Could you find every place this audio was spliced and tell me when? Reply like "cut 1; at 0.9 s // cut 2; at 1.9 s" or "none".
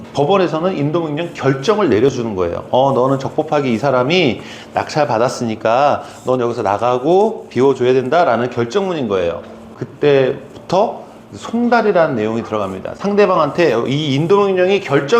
none